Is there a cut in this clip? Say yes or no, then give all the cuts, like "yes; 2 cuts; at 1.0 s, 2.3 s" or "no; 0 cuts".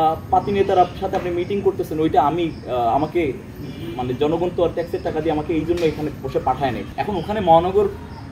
yes; 1 cut; at 6.9 s